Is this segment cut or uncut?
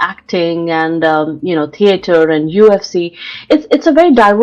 uncut